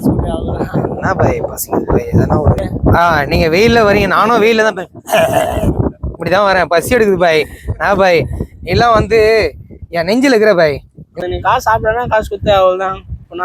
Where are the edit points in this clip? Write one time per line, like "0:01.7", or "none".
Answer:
0:02.6
0:11.2